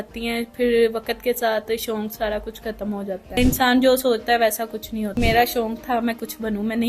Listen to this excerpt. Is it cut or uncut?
cut